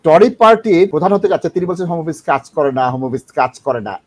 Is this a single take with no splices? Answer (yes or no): no